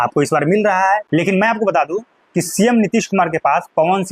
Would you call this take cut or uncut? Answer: cut